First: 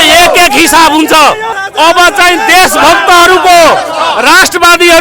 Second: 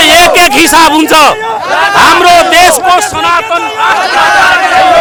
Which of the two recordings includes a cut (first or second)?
first